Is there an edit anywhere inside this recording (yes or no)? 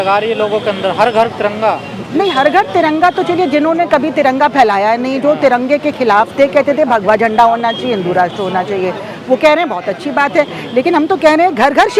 no